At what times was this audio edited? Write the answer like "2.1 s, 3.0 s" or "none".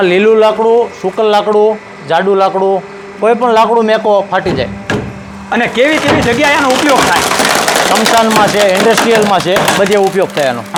none